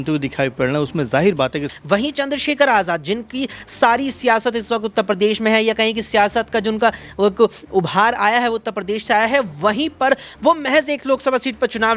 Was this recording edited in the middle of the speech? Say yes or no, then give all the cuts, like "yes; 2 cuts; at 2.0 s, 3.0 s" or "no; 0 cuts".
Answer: yes; 1 cut; at 1.7 s